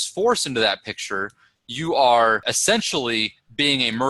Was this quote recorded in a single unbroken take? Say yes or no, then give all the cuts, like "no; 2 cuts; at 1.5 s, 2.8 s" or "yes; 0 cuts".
yes; 0 cuts